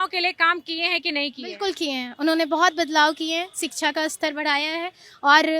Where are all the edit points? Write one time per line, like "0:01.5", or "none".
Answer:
none